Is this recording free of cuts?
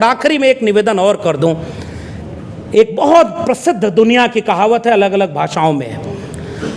yes; 0 cuts

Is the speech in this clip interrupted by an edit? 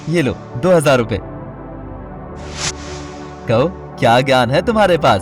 yes; 2 cuts; at 1.2 s, 3.3 s

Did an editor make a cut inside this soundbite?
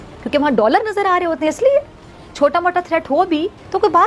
no; 0 cuts

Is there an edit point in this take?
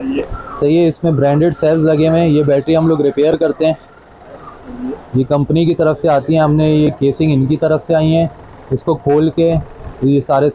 no; 0 cuts

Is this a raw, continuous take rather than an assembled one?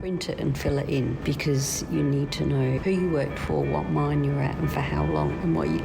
no; 2 cuts; at 1.2 s, 2.8 s

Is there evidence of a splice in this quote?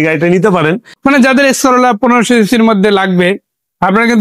yes; 1 cut; at 0.9 s

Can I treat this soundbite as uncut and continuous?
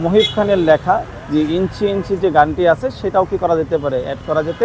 yes; 0 cuts

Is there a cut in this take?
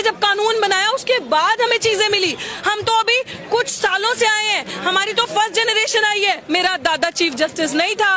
yes; 1 cut; at 6.4 s

